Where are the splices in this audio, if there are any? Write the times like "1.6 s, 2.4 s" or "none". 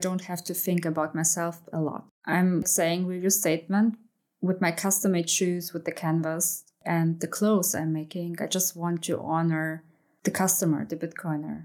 2.1 s, 4.1 s